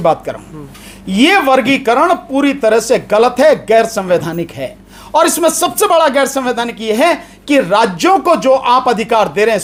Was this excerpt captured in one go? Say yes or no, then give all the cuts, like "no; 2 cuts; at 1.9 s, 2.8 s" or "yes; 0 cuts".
yes; 0 cuts